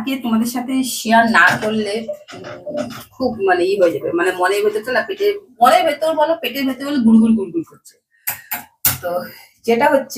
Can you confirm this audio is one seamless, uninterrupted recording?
yes; 0 cuts

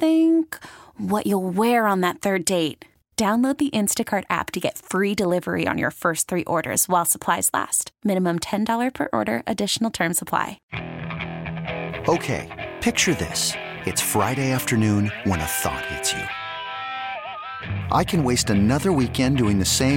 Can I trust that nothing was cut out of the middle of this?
no; 1 cut; at 10.7 s

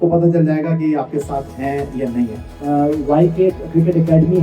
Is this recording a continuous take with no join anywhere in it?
no; 1 cut; at 2.5 s

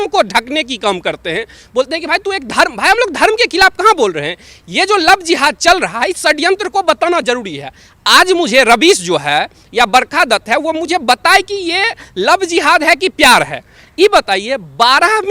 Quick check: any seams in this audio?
no; 0 cuts

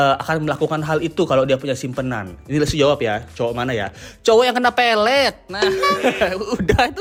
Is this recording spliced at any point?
no; 0 cuts

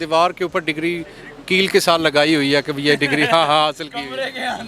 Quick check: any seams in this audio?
no; 0 cuts

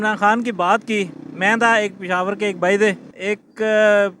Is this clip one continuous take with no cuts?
no; 1 cut; at 3.1 s

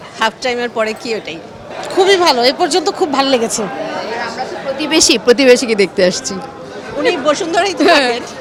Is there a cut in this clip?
no; 0 cuts

